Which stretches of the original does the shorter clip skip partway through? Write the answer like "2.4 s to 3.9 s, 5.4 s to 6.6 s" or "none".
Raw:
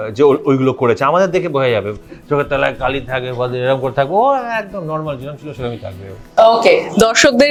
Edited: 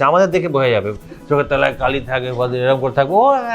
none